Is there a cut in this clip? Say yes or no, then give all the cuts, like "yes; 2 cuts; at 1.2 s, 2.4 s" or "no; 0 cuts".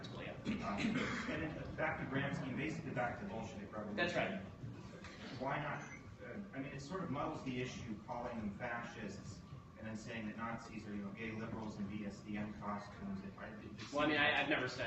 yes; 1 cut; at 12.2 s